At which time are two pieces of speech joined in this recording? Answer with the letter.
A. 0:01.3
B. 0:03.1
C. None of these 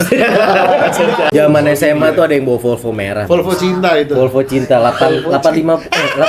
A